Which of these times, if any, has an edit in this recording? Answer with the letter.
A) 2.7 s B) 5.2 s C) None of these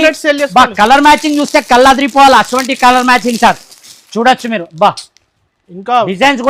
C